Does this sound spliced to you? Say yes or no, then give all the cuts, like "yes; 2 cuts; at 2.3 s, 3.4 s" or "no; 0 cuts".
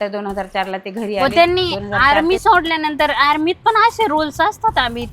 yes; 1 cut; at 1.2 s